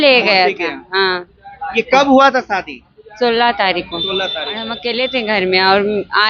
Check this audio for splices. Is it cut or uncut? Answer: cut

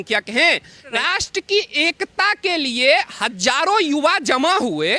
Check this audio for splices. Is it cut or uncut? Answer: cut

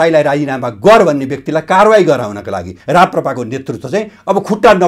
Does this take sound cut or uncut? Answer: cut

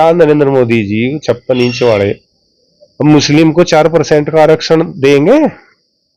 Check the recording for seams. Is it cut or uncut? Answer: uncut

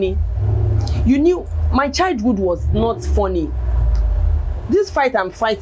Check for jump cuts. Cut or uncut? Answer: uncut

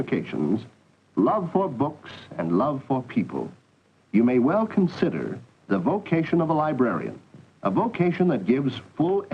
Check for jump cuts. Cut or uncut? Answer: cut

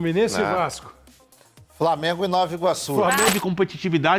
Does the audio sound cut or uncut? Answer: cut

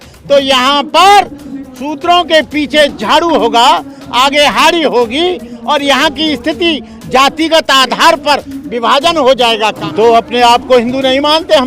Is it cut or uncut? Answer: cut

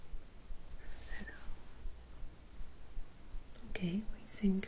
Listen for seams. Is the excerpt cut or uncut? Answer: cut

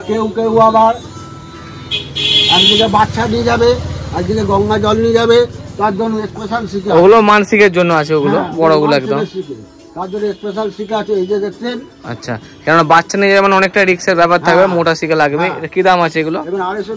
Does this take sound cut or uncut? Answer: uncut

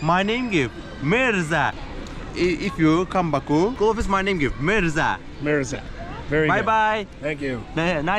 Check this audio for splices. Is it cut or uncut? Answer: uncut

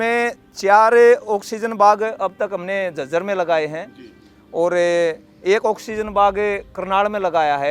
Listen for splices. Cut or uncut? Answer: uncut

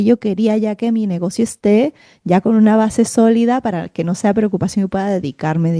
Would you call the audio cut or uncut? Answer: uncut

